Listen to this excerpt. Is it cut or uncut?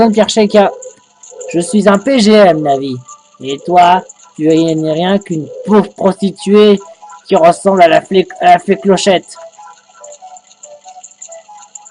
uncut